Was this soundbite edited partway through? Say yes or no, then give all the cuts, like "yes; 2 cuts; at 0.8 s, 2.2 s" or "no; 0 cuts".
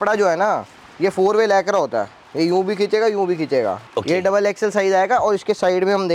yes; 1 cut; at 3.8 s